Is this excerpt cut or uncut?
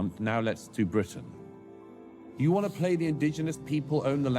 cut